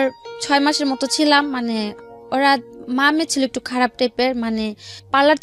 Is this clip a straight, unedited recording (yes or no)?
yes